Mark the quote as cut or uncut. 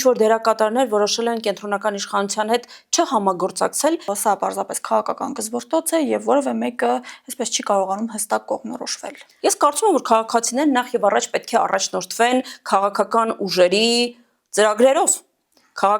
cut